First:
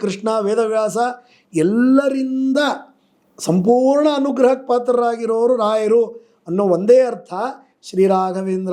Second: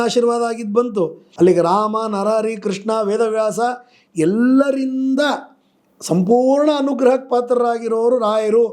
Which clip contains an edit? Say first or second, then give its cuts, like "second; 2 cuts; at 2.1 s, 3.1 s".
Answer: second; 1 cut; at 1.2 s